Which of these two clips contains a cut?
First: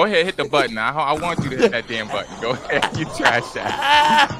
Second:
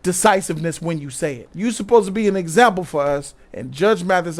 second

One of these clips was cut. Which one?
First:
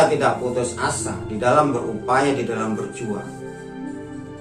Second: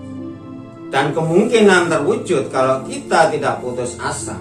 second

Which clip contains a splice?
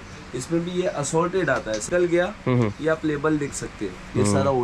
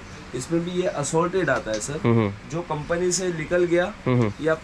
first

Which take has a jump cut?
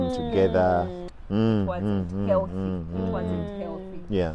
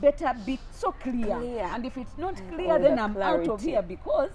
first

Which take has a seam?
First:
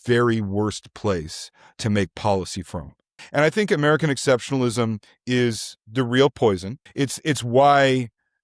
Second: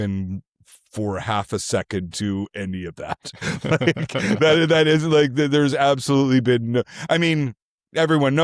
first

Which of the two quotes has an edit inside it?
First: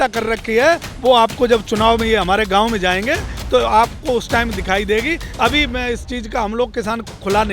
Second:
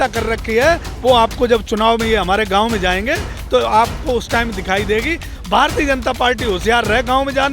second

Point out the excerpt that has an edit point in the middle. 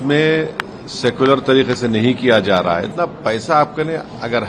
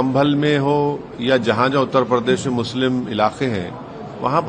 first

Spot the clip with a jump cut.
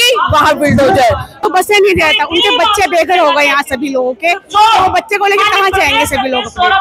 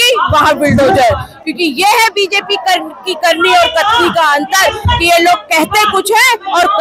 first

